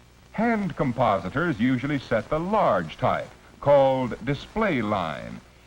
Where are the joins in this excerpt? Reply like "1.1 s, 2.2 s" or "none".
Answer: 3.9 s